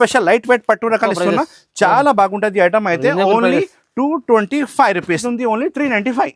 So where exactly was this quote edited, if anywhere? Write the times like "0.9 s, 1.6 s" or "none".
5.2 s